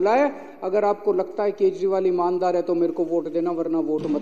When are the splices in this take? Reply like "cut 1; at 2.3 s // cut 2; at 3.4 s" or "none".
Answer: none